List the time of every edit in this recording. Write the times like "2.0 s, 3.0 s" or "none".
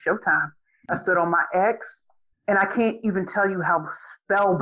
0.9 s